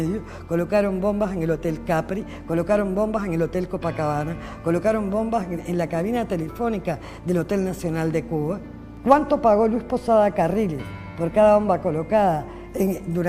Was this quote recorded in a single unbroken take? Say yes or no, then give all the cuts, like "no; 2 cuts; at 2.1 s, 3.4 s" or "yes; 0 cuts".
yes; 0 cuts